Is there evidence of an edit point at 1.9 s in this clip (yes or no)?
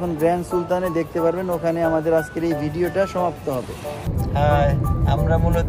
no